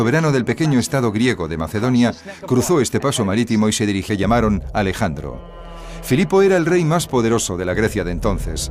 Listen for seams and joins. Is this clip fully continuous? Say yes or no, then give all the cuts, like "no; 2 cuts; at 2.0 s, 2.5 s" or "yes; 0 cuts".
yes; 0 cuts